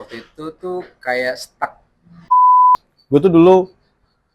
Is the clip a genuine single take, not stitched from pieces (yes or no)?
no